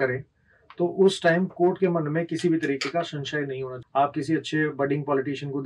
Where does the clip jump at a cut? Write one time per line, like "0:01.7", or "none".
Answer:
0:03.7

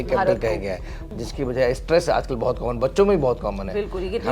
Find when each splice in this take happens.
0:01.0

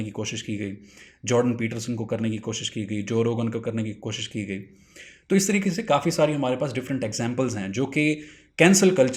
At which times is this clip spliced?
none

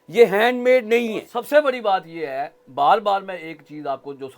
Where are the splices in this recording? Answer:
0:01.3

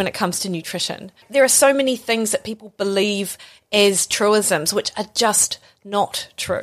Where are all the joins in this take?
0:01.2

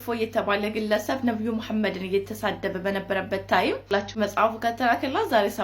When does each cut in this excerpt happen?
0:03.9

